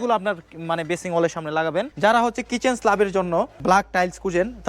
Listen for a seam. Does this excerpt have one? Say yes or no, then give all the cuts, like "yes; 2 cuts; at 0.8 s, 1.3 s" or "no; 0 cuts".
yes; 2 cuts; at 1.9 s, 3.6 s